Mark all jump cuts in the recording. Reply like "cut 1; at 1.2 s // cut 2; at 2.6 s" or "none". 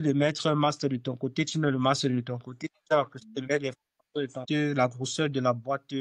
cut 1; at 4.4 s